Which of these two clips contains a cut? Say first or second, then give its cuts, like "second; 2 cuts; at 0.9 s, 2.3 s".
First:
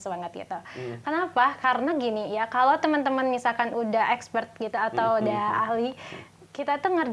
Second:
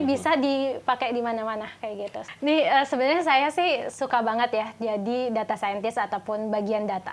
second; 1 cut; at 2.2 s